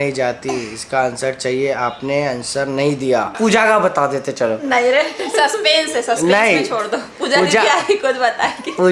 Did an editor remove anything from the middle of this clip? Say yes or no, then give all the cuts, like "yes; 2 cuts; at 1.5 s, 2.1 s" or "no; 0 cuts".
yes; 1 cut; at 3.3 s